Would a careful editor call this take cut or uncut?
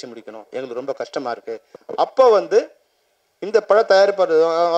cut